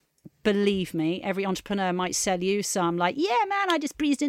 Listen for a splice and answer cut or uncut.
uncut